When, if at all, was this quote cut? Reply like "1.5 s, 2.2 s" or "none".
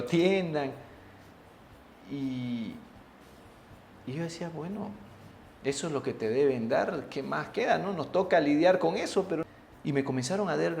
9.4 s